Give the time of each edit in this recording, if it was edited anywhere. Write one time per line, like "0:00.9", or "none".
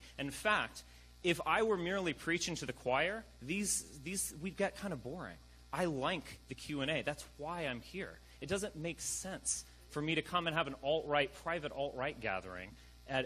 0:02.8